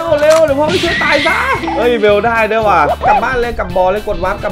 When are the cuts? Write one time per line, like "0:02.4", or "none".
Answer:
0:01.6
0:03.2